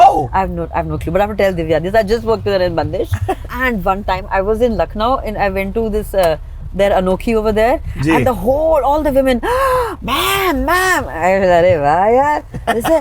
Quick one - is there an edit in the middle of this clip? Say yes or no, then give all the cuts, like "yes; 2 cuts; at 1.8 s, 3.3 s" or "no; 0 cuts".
yes; 1 cut; at 3.5 s